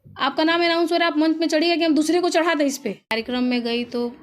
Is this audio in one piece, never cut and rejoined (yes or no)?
no